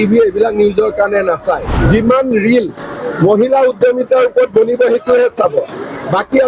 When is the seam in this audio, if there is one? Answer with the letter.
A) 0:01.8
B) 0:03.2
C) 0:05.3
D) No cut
A